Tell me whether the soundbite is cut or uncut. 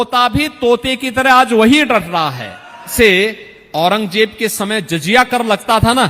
cut